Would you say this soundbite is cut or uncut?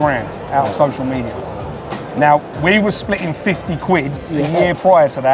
uncut